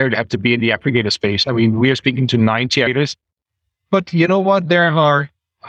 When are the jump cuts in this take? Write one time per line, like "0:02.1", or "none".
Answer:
0:03.1